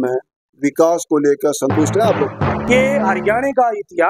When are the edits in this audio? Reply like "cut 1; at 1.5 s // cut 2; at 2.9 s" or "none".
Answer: cut 1; at 2.6 s